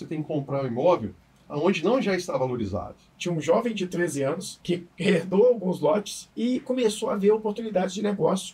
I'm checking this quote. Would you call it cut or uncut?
cut